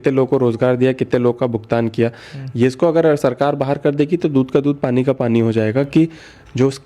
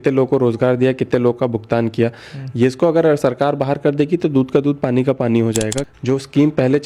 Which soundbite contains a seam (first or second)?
second